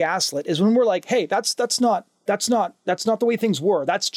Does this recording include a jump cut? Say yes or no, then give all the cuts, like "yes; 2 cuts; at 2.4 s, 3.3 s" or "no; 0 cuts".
no; 0 cuts